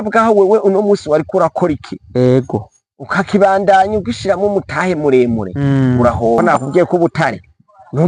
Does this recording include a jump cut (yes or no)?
yes